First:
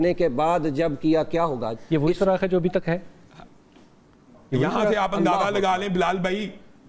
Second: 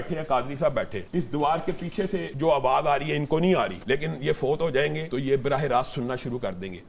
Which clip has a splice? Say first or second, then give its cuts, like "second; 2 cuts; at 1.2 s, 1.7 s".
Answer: second; 4 cuts; at 1.0 s, 2.3 s, 3.8 s, 5.0 s